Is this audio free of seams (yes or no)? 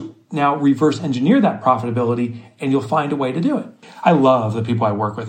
no